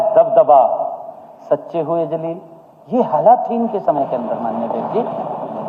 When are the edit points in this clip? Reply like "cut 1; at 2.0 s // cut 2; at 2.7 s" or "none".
none